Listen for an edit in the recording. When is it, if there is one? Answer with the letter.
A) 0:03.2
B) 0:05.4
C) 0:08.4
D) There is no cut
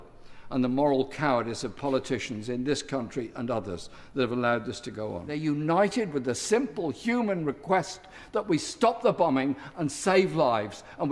B